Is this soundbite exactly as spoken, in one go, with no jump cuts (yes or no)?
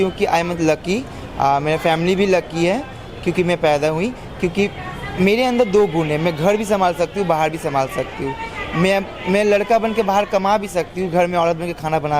yes